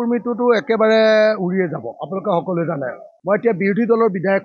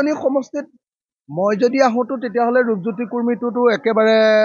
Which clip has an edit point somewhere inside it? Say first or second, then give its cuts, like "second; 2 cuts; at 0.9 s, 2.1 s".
first; 1 cut; at 3.1 s